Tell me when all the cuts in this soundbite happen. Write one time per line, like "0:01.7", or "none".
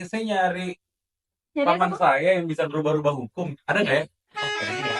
none